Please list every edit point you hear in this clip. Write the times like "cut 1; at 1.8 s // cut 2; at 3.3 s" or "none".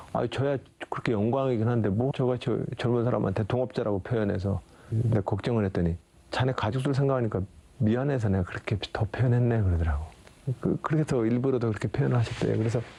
none